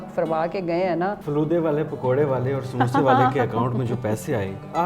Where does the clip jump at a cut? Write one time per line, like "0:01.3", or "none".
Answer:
0:01.2